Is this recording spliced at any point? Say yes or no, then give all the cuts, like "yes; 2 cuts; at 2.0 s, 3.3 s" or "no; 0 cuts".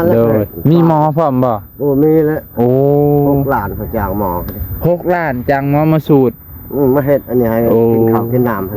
no; 0 cuts